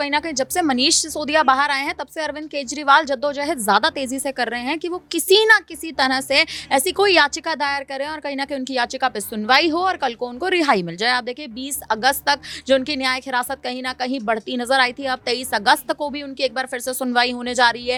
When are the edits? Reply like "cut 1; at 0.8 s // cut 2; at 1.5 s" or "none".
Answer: none

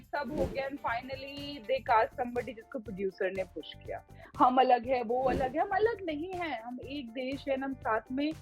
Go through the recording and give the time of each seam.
cut 1; at 4.2 s

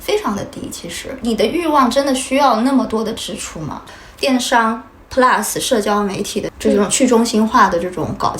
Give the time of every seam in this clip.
cut 1; at 3.8 s // cut 2; at 6.5 s

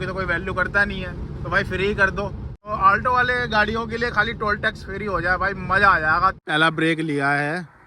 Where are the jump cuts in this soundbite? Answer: cut 1; at 2.7 s // cut 2; at 6.5 s

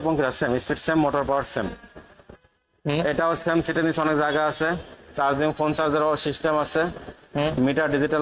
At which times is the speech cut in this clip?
none

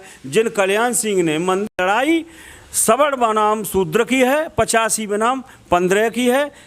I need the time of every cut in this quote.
cut 1; at 1.6 s

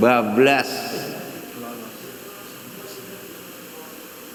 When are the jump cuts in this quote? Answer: none

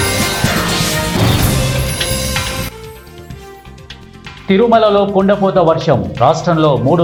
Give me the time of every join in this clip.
none

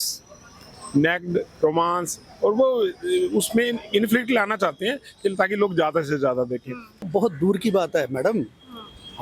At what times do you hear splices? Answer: cut 1; at 7.0 s

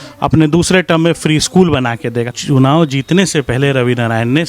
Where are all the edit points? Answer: cut 1; at 2.3 s

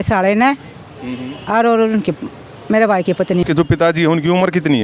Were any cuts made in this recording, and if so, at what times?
cut 1; at 3.4 s

